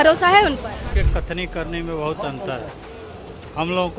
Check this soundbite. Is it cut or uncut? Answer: cut